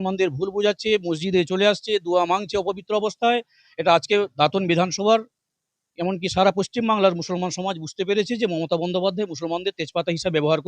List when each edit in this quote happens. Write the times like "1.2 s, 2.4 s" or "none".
none

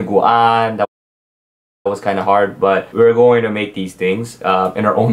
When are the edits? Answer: 3.4 s

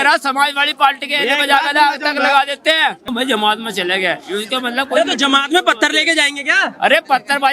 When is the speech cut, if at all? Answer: 3.1 s

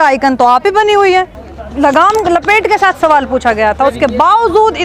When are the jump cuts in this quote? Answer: 1.5 s

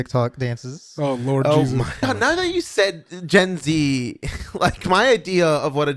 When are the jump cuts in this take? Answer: 2.1 s

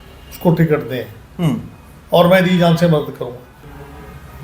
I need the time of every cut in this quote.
3.5 s

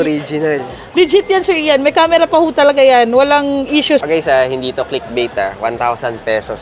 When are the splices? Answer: 4.0 s

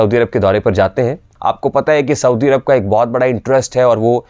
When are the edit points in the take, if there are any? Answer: 1.3 s

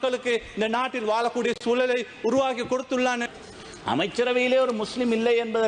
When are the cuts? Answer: 3.2 s

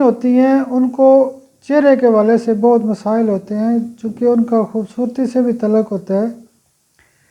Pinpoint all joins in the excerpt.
none

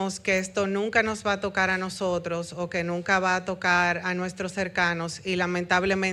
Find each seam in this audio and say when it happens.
none

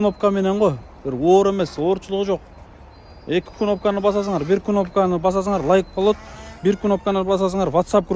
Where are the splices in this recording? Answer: none

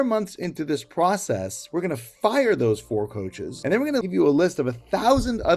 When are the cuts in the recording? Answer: 4.0 s

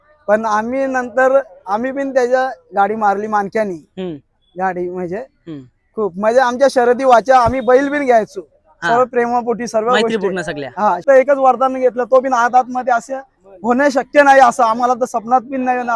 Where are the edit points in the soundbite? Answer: 11.0 s

